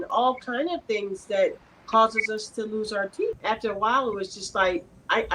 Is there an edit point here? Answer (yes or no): yes